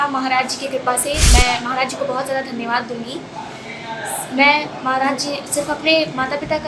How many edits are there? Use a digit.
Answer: 1